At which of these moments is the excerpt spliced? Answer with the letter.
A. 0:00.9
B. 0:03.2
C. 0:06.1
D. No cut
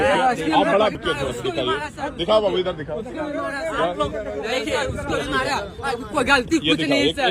A